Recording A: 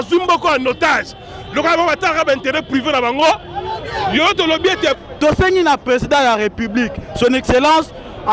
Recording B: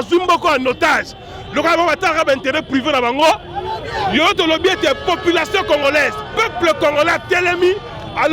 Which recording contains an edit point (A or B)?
A